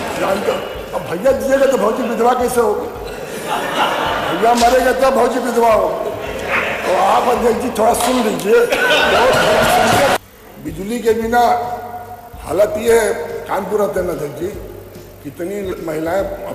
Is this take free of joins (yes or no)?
no